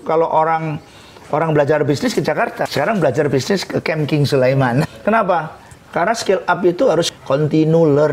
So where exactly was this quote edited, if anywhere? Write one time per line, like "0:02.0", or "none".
0:02.6
0:04.9
0:07.1